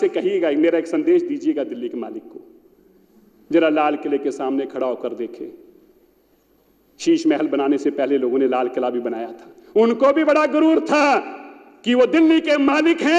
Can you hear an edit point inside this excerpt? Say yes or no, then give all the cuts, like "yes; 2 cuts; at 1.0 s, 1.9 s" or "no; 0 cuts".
no; 0 cuts